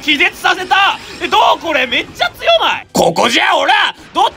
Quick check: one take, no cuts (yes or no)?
no